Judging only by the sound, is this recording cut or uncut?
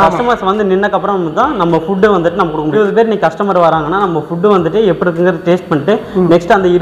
cut